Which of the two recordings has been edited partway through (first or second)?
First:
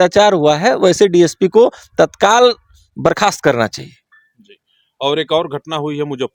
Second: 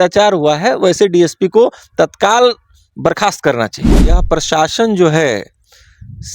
second